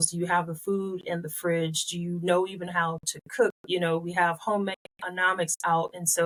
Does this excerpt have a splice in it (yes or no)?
no